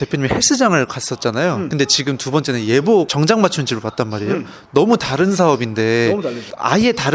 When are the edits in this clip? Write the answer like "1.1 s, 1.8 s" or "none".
none

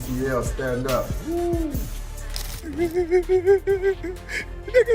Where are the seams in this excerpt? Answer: 2.5 s

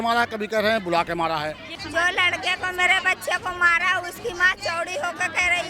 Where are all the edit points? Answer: 1.7 s

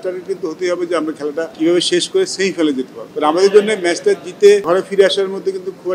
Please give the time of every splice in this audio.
1.5 s, 3.0 s, 4.6 s

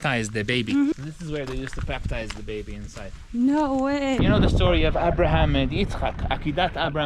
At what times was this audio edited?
0.9 s, 4.2 s

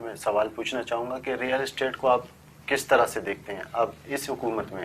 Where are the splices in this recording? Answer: none

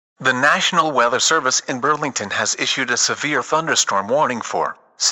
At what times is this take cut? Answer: 3.0 s, 4.3 s

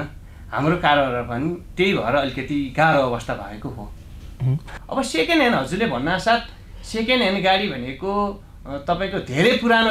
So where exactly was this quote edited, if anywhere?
4.7 s

